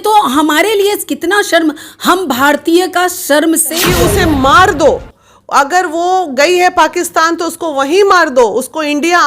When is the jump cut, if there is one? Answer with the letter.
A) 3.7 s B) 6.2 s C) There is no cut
A